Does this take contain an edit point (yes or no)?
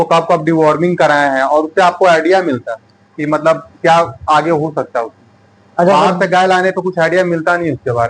no